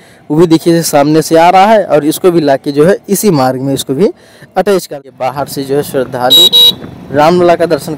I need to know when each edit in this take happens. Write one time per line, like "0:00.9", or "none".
0:05.0